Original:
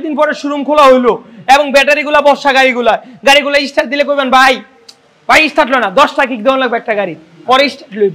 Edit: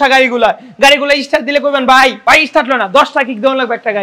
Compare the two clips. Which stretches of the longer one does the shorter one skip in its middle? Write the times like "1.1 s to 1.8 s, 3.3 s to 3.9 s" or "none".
4.6 s to 5.2 s